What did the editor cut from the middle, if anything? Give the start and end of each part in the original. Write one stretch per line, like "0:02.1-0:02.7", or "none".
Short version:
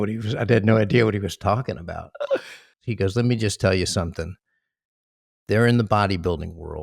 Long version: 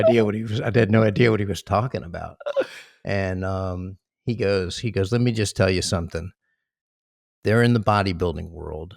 0:03.0-0:04.7